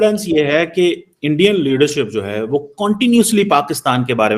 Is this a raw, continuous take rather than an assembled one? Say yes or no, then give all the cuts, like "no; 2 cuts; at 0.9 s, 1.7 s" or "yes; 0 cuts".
yes; 0 cuts